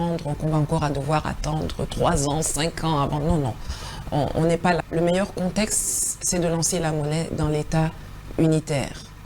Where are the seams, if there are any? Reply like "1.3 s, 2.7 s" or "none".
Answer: 4.8 s